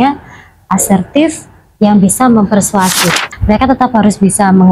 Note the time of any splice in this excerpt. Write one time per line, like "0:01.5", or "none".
0:03.2